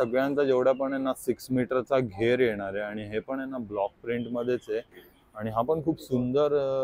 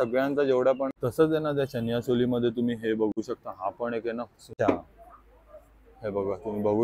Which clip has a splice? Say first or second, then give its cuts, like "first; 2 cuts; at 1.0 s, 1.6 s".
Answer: second; 2 cuts; at 0.9 s, 4.5 s